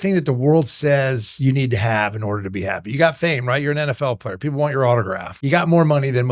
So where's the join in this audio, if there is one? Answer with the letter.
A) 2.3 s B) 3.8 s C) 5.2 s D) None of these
C